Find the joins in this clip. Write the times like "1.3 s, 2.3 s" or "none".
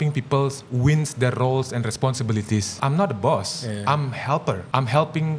2.7 s, 4.6 s